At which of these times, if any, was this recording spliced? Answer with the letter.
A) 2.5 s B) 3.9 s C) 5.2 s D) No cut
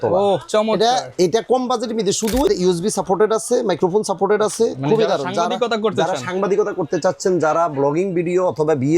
A